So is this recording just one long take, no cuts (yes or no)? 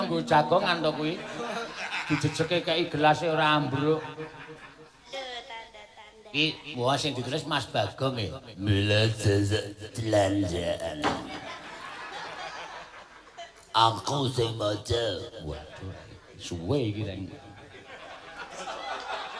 no